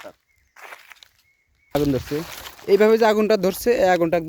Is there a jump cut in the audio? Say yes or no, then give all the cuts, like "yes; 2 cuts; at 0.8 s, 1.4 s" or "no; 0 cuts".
yes; 1 cut; at 1.8 s